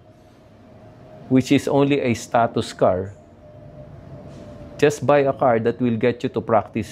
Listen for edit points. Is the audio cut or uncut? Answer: uncut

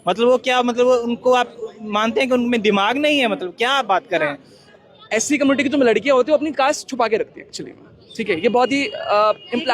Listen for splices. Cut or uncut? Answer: cut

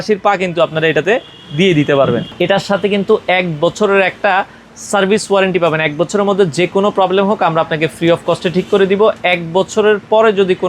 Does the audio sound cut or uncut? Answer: cut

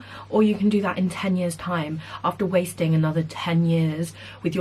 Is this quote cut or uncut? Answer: uncut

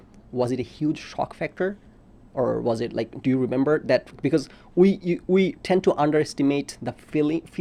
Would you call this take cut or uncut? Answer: uncut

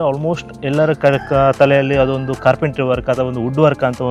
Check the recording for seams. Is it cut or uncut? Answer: uncut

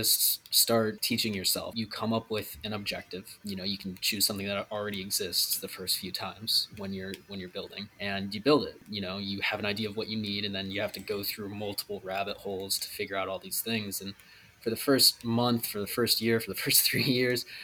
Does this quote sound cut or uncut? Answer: cut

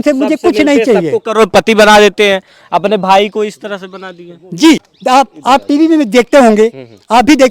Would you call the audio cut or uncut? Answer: cut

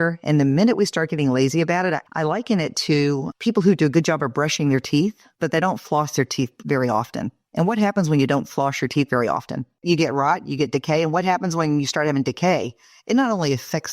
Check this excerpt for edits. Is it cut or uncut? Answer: cut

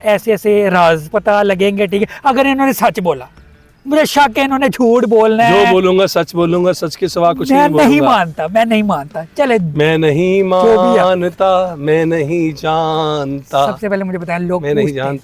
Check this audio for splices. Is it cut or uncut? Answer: uncut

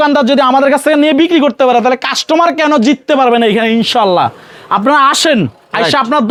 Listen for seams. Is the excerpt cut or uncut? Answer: uncut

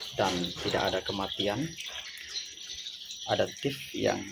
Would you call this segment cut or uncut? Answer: uncut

